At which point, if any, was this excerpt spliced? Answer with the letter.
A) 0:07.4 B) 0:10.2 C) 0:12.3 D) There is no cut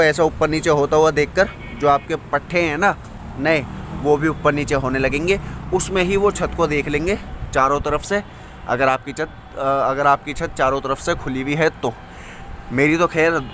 D